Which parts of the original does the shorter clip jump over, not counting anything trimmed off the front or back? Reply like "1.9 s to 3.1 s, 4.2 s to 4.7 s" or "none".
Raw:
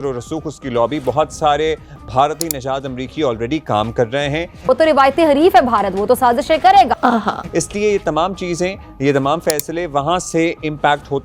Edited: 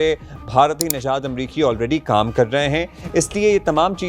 4.5 s to 7.3 s